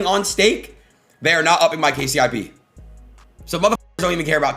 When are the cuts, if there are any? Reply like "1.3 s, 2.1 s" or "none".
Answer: none